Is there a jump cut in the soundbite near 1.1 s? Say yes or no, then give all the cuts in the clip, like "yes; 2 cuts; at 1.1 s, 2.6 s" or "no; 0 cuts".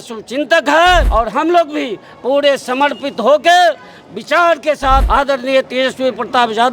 yes; 2 cuts; at 1.1 s, 5.1 s